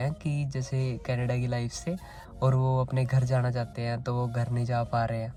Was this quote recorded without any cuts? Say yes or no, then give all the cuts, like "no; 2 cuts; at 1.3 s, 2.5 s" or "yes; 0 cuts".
yes; 0 cuts